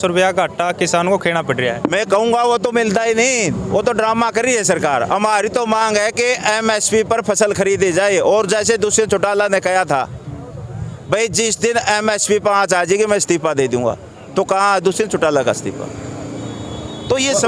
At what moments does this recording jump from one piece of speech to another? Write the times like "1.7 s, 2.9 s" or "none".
none